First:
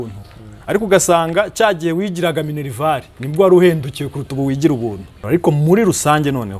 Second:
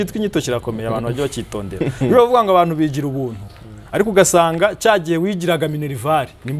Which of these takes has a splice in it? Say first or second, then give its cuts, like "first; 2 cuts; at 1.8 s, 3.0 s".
first; 1 cut; at 5.2 s